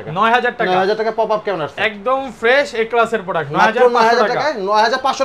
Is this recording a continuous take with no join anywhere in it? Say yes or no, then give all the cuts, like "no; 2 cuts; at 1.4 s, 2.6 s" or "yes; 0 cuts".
yes; 0 cuts